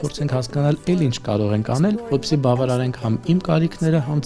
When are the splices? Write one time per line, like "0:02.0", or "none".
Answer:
0:02.0